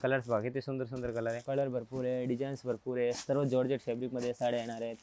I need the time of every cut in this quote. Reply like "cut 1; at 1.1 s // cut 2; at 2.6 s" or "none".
cut 1; at 1.4 s

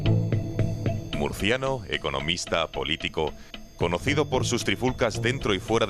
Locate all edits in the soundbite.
none

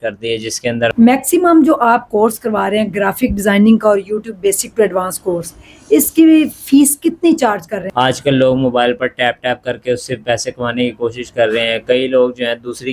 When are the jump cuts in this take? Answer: cut 1; at 0.9 s // cut 2; at 7.8 s

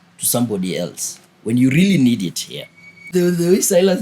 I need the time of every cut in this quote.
cut 1; at 3.1 s

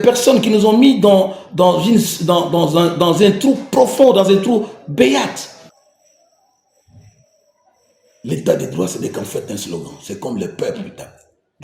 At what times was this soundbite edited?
cut 1; at 5.8 s

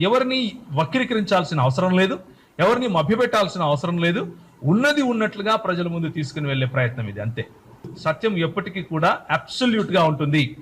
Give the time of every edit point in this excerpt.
cut 1; at 7.9 s

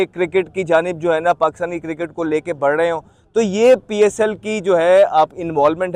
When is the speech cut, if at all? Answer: none

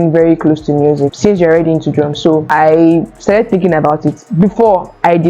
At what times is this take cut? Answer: cut 1; at 1.1 s // cut 2; at 2.5 s

